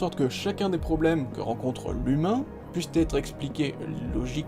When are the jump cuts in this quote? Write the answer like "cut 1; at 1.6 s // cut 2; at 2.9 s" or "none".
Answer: none